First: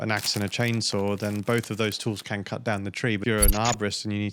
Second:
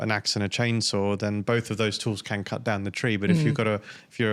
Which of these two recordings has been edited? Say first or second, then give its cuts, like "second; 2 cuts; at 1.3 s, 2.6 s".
first; 1 cut; at 3.2 s